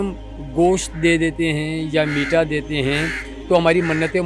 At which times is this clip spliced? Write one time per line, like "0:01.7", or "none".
none